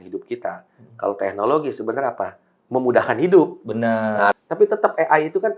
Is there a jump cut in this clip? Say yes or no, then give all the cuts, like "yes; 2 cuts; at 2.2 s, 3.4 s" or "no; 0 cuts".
yes; 1 cut; at 4.3 s